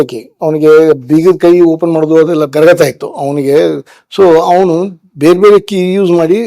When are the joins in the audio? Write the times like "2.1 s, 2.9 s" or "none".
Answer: 2.5 s